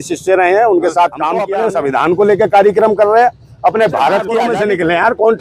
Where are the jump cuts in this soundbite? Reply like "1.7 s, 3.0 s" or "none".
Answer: 1.5 s, 4.3 s